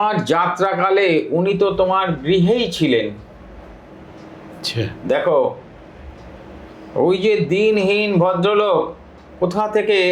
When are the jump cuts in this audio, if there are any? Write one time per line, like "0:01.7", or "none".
none